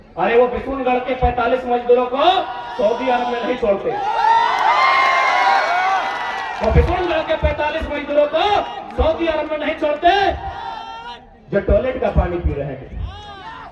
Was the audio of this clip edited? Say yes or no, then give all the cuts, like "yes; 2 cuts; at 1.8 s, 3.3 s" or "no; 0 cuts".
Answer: no; 0 cuts